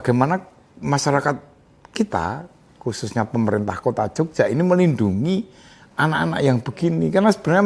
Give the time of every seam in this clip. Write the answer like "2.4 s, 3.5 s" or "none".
none